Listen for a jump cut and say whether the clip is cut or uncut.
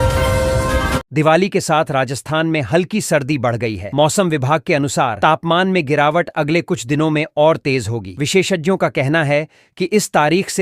cut